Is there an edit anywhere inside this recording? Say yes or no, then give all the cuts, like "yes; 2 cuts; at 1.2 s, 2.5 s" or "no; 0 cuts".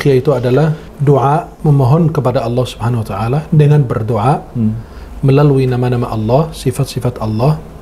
yes; 2 cuts; at 0.9 s, 1.5 s